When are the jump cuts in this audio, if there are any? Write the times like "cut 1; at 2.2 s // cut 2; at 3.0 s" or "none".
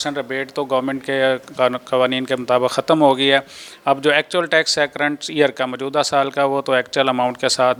none